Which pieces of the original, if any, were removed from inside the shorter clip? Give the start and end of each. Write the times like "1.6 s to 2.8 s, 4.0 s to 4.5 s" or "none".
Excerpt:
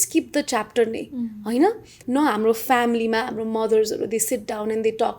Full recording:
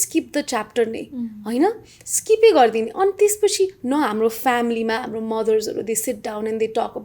2.0 s to 3.8 s

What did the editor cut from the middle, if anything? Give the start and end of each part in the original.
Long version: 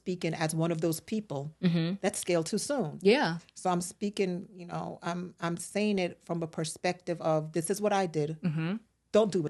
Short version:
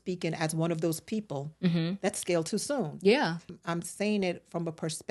3.5 s to 5.3 s

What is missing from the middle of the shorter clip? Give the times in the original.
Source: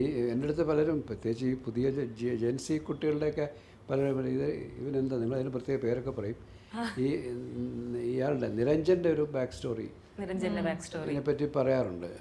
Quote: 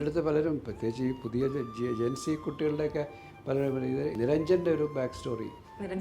4.6 s to 8.5 s

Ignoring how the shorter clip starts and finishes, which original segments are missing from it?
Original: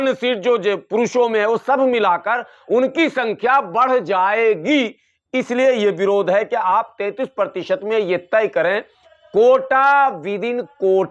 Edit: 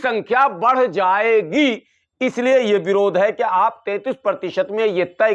none

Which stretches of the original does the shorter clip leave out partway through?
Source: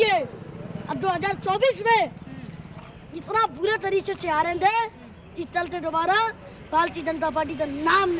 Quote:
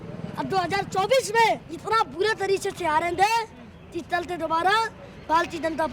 2.2 s to 3.1 s

